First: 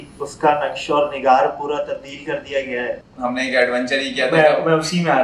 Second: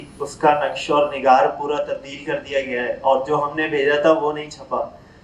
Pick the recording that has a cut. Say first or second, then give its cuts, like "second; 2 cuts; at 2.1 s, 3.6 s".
first; 1 cut; at 2.9 s